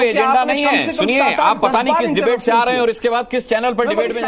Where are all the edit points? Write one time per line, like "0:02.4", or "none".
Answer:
none